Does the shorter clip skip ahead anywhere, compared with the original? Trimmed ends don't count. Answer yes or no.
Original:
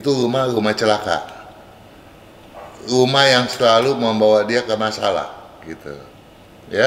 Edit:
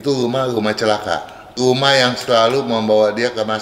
yes